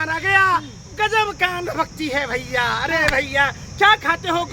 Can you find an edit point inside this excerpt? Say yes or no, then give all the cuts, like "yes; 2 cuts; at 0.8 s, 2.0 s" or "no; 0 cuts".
no; 0 cuts